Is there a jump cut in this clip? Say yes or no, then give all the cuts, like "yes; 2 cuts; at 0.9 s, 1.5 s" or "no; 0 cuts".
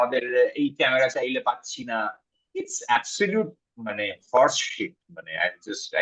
no; 0 cuts